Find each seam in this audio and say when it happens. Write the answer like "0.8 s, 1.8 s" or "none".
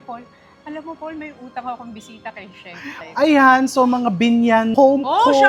2.9 s, 4.7 s